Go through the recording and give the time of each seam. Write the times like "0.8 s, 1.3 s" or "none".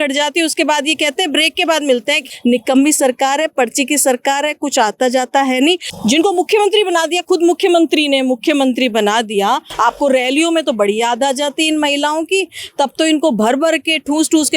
2.2 s, 5.9 s, 9.7 s